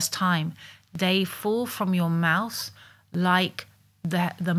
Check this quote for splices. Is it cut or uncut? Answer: uncut